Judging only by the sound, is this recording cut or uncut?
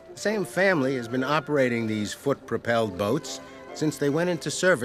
cut